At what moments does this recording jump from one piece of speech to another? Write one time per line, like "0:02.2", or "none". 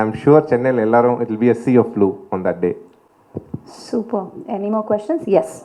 none